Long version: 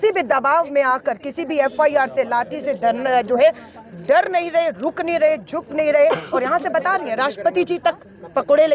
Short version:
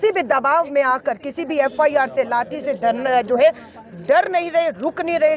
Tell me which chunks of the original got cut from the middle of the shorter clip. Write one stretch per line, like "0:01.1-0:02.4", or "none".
none